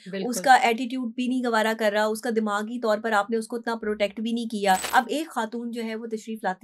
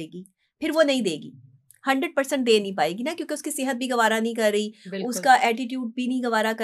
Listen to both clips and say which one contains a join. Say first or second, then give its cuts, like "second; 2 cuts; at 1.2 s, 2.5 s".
first; 1 cut; at 4.8 s